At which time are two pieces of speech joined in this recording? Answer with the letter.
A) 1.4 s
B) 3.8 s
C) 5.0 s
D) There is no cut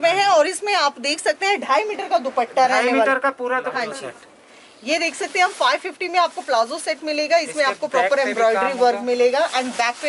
B